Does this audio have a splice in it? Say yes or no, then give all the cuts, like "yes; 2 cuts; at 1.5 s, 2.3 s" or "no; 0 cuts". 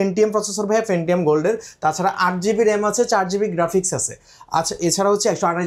no; 0 cuts